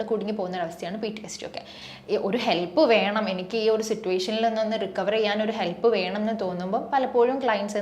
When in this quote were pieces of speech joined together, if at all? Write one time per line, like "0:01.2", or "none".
0:01.8